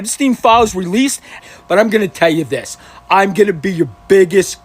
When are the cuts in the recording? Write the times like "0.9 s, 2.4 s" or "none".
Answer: 1.4 s